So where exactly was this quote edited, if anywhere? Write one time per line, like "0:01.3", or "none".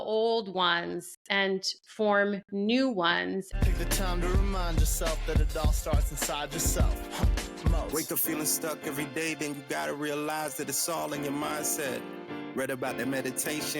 0:03.5